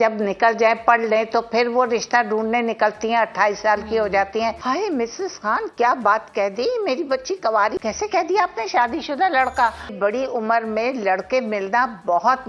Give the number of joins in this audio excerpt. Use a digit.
3